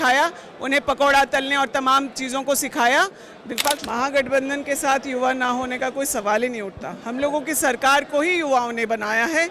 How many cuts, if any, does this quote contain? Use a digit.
1